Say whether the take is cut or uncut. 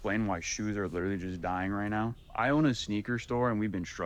cut